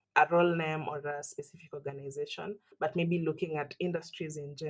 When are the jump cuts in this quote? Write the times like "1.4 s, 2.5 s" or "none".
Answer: 2.7 s